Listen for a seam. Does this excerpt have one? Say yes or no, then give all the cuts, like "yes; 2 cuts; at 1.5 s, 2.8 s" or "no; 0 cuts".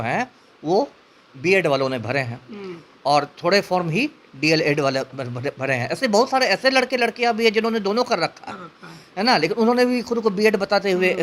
no; 0 cuts